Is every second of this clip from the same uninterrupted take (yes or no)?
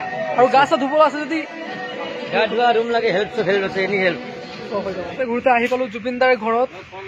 no